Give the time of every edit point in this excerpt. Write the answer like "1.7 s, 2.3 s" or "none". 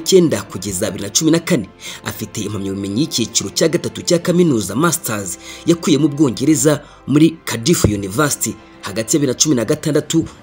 7.5 s